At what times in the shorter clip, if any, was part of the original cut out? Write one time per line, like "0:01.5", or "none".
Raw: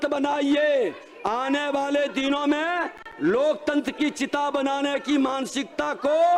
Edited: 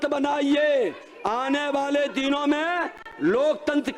none